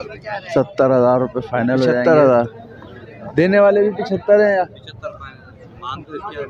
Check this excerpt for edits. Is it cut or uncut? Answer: cut